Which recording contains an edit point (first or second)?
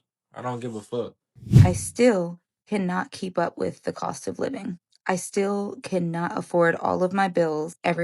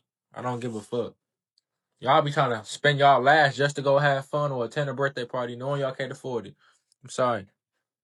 first